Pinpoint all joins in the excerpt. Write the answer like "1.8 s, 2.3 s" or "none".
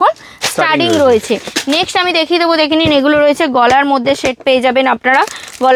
none